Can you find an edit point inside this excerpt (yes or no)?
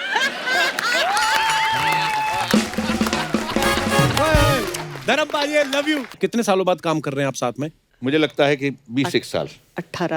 yes